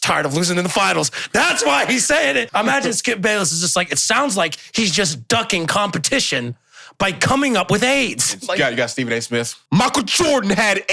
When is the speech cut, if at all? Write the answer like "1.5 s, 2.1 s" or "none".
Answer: 2.5 s, 9.6 s